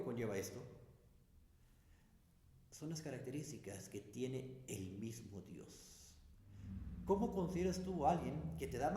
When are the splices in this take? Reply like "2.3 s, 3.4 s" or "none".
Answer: 6.5 s